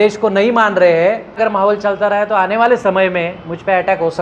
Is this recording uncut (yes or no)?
no